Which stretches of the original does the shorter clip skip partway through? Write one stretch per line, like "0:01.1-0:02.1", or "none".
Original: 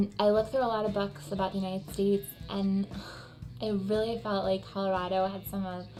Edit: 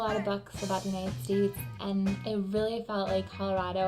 0:02.9-0:03.6